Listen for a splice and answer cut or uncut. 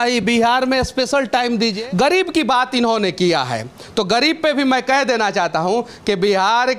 cut